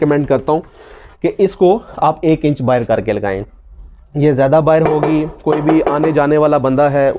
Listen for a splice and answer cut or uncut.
uncut